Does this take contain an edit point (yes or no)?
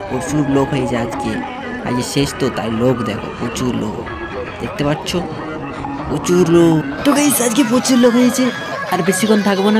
no